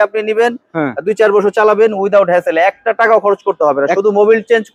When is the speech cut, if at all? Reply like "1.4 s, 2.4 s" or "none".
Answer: none